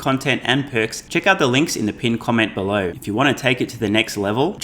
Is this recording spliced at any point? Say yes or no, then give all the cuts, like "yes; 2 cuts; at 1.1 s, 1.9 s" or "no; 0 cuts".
yes; 2 cuts; at 1.0 s, 3.0 s